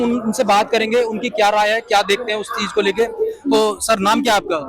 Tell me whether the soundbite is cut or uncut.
uncut